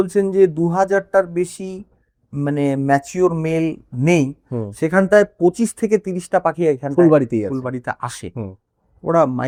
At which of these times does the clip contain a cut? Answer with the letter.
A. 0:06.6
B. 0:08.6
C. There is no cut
C